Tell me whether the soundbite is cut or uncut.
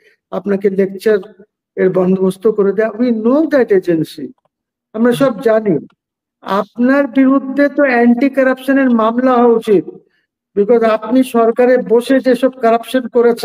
uncut